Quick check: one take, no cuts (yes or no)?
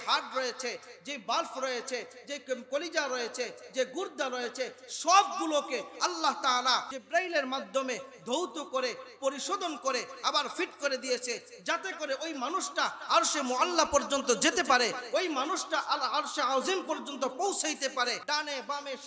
no